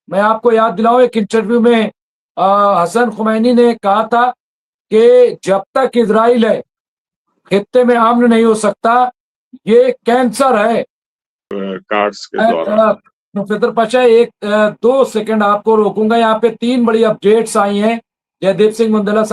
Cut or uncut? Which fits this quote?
cut